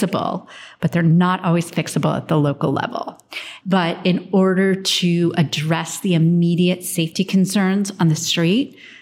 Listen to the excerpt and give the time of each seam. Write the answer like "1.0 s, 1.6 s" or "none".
none